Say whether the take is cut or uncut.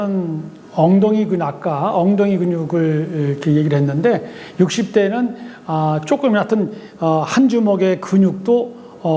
uncut